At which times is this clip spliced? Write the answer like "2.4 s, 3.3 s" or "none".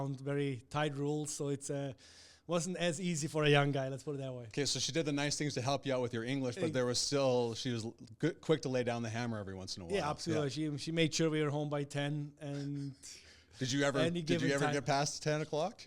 none